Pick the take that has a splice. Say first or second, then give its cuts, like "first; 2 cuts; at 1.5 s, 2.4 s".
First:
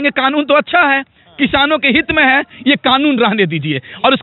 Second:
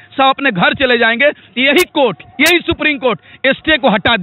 first; 1 cut; at 2.6 s